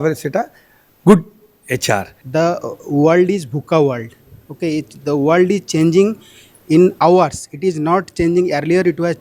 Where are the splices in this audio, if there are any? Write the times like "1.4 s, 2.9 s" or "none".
2.2 s